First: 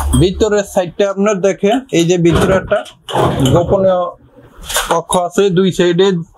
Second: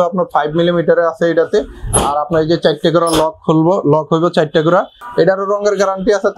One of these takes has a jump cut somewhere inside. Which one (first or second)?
second